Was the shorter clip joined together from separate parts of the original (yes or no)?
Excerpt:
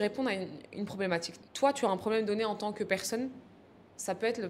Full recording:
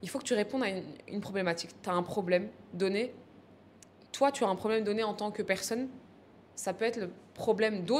yes